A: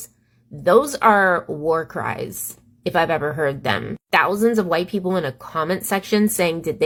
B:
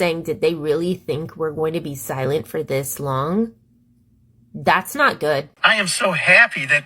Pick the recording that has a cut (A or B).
B